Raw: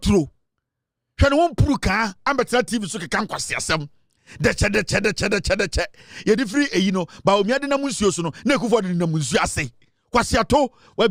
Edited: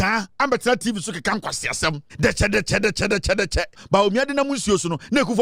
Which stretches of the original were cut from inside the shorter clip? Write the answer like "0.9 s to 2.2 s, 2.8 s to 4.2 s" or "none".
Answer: 3.9 s to 4.3 s, 6.0 s to 7.1 s